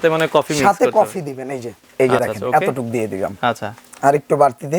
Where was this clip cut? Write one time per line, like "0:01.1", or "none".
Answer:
0:02.2